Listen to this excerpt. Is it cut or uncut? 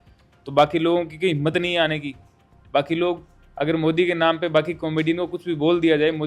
uncut